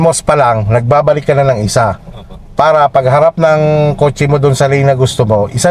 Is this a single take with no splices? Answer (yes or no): yes